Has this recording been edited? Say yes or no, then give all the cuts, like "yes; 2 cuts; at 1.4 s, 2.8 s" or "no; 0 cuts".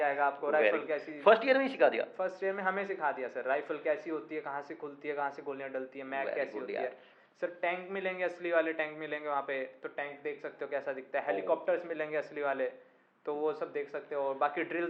no; 0 cuts